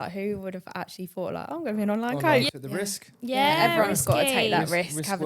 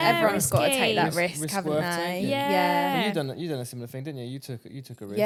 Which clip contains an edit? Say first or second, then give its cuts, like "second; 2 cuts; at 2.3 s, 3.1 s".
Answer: first; 1 cut; at 2.5 s